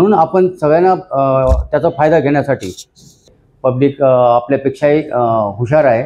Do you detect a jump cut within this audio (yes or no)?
yes